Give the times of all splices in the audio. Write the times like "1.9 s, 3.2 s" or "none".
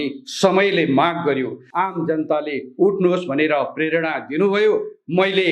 1.6 s